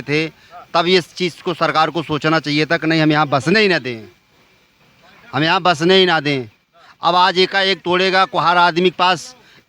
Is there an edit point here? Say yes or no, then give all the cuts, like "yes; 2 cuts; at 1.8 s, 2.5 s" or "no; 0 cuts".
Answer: no; 0 cuts